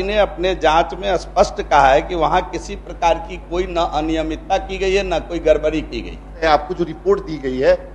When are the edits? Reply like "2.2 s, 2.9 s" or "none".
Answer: 6.4 s